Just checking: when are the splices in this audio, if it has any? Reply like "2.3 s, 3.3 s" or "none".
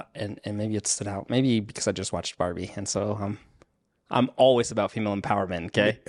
none